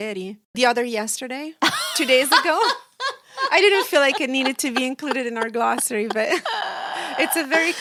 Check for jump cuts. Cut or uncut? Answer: uncut